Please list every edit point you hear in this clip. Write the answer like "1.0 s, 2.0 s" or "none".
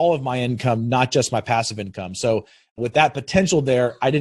2.8 s